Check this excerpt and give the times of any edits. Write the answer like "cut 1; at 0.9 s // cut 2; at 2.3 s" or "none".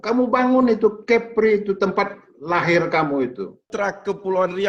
cut 1; at 3.6 s